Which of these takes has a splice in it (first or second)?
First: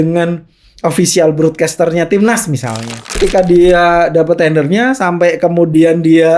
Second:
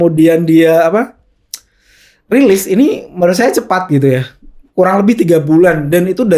first